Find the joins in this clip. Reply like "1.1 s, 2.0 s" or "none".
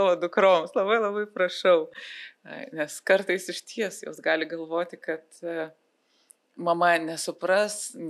none